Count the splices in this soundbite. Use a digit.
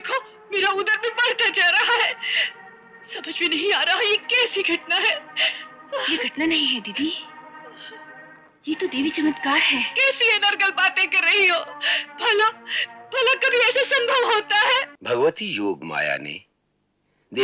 2